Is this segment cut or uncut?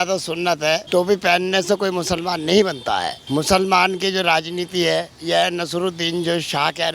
cut